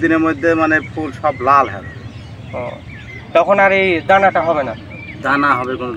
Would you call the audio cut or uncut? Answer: uncut